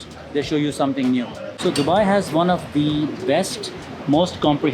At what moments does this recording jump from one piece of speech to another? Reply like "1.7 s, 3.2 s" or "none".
1.4 s